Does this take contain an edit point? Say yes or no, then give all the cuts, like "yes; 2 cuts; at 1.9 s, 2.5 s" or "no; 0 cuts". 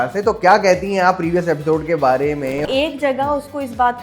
yes; 1 cut; at 2.6 s